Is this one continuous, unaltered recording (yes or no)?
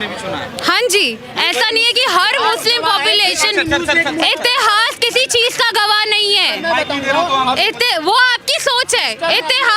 yes